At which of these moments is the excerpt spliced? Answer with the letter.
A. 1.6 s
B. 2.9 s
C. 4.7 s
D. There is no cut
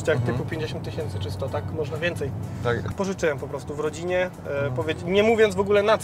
B